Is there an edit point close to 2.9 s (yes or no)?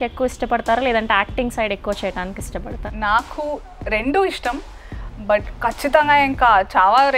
yes